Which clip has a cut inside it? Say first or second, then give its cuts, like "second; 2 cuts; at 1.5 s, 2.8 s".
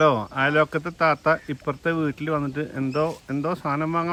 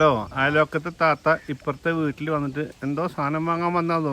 second; 1 cut; at 2.7 s